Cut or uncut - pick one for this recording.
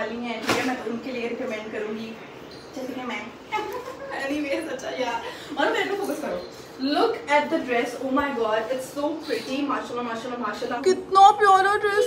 cut